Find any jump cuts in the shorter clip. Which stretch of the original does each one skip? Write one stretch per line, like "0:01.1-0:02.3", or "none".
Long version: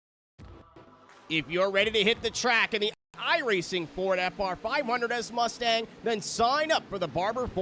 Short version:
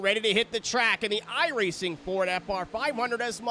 0:03.0-0:03.2